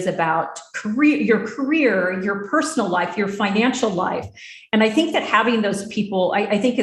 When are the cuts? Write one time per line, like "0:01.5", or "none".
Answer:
none